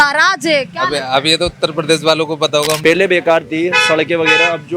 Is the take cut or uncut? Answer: cut